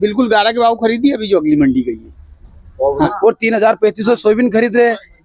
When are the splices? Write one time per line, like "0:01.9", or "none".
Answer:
0:03.1